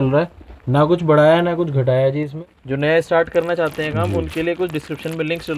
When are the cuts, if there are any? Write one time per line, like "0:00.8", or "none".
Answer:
0:02.3